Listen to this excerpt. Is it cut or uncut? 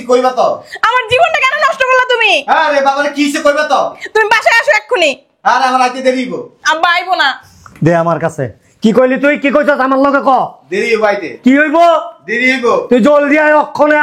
uncut